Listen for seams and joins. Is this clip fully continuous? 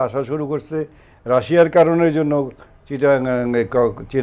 yes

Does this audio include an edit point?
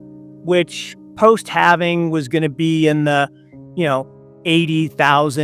no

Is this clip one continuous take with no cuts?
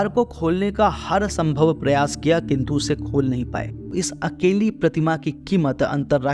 no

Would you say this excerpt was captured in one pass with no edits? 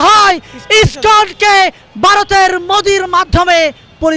yes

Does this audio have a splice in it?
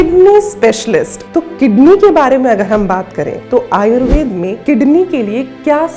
yes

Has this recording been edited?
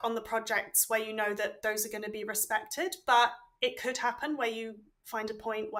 no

